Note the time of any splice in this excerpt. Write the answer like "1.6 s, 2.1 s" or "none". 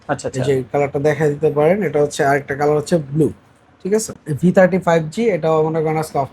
4.2 s